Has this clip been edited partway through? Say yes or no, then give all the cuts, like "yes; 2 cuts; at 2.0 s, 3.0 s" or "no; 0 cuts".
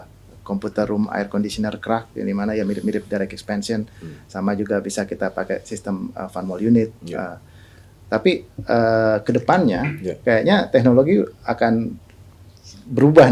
no; 0 cuts